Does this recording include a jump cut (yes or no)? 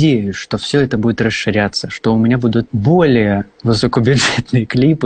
yes